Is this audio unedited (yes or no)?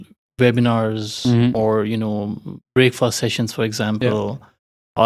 yes